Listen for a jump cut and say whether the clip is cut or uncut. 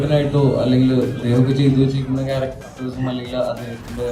cut